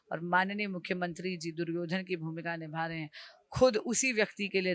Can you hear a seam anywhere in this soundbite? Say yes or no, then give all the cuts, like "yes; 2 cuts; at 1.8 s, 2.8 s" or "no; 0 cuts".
no; 0 cuts